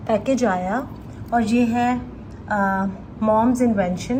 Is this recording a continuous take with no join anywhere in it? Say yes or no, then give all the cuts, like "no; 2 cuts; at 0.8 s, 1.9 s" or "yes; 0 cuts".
yes; 0 cuts